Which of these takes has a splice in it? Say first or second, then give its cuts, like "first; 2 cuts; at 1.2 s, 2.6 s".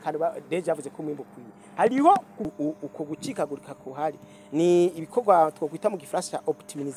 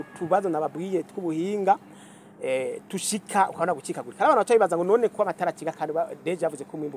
first; 1 cut; at 2.4 s